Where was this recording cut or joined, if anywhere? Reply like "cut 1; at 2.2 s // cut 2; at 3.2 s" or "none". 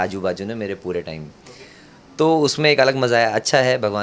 none